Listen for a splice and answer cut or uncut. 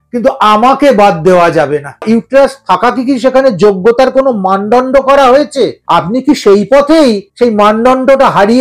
cut